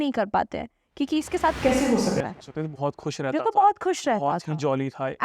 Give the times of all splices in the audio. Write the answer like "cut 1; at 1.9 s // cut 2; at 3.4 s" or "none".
none